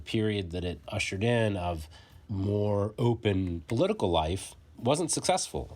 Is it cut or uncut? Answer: cut